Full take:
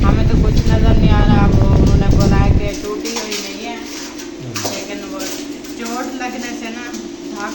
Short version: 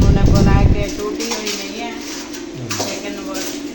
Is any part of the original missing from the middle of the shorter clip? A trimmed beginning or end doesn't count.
no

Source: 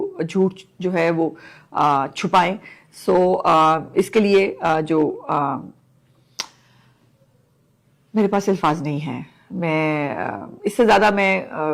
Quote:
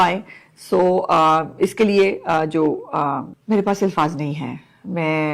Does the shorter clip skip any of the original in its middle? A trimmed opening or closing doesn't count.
yes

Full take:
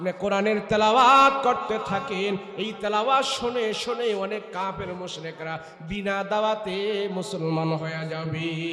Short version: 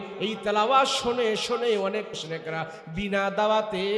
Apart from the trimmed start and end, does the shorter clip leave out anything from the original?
yes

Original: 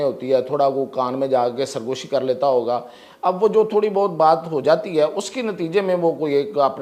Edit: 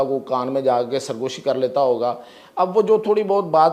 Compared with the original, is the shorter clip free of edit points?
yes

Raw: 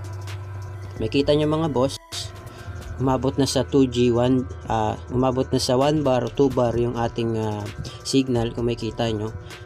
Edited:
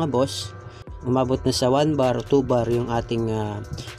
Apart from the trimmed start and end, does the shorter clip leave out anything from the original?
yes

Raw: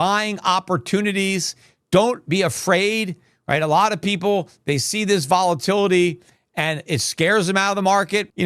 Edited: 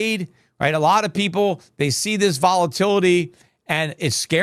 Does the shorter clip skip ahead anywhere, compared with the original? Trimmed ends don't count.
no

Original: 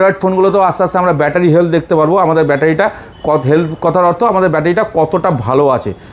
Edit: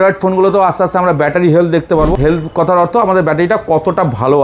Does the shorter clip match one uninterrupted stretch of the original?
no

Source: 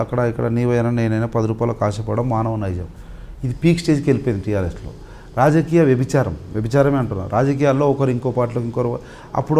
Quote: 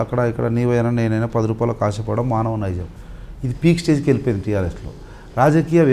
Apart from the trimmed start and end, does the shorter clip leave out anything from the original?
no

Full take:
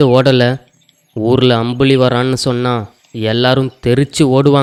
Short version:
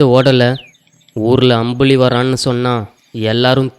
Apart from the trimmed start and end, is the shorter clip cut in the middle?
no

